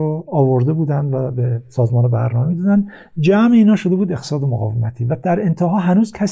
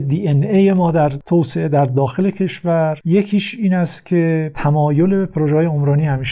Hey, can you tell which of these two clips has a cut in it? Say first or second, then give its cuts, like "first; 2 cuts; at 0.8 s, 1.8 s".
second; 3 cuts; at 1.2 s, 3.0 s, 4.5 s